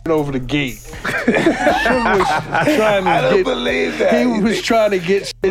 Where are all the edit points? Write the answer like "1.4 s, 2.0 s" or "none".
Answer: none